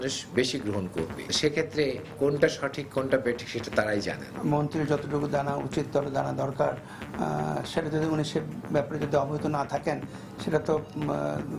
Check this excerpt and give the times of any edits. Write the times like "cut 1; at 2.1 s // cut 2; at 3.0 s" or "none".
cut 1; at 4.3 s